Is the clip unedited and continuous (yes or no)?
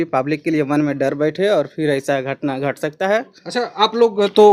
yes